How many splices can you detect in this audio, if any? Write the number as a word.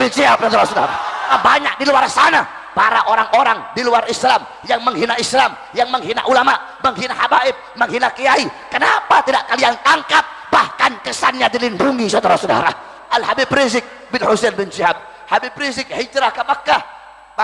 one